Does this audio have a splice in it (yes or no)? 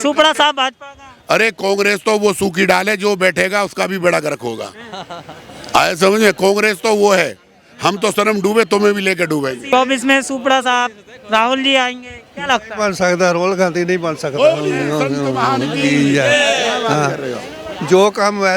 yes